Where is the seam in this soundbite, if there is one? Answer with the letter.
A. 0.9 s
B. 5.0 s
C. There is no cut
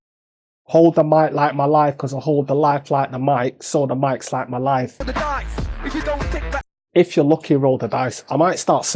B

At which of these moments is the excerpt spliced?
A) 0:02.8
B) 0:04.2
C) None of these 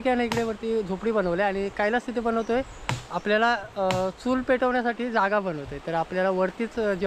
C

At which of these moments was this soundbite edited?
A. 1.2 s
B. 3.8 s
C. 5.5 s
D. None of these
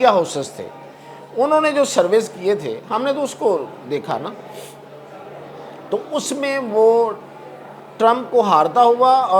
D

